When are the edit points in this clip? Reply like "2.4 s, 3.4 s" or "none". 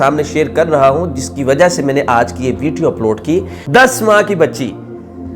3.6 s